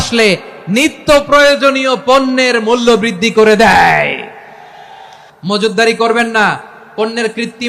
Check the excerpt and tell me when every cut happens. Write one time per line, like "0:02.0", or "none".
0:05.2

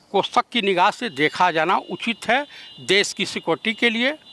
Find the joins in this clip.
none

